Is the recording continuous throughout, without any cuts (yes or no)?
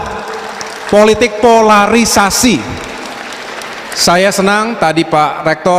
yes